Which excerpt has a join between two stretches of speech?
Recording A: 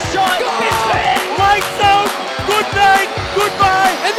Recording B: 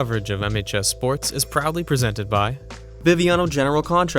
B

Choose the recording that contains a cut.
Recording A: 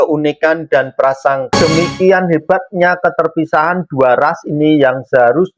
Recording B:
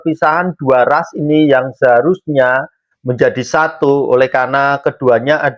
A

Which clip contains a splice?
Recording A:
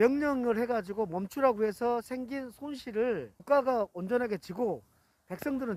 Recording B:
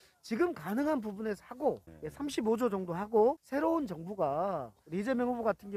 B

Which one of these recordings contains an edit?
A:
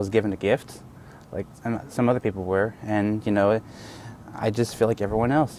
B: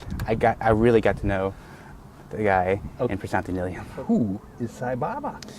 B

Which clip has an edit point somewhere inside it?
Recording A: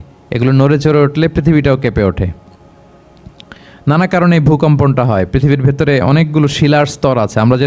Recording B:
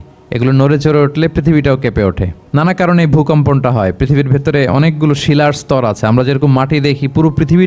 B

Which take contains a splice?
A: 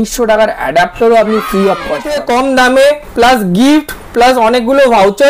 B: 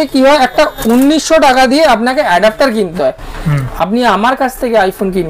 A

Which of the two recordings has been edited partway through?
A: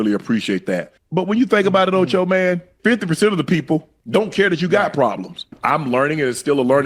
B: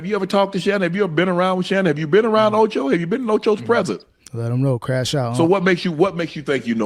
A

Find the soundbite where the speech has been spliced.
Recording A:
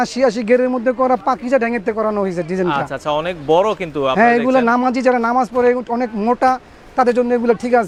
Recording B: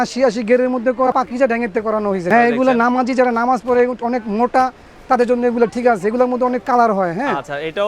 B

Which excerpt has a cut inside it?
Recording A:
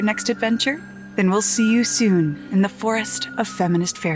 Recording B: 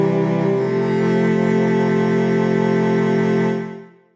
A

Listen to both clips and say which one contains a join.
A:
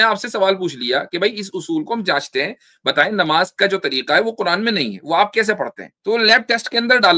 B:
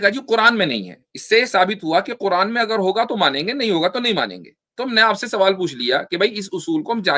A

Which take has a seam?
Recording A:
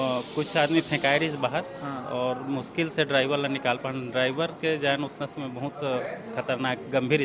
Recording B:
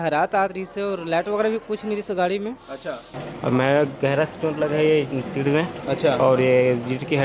B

